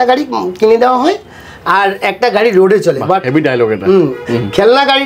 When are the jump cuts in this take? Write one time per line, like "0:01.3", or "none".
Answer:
none